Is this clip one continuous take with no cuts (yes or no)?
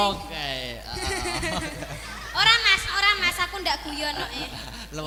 yes